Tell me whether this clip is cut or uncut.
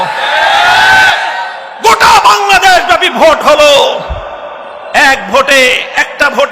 cut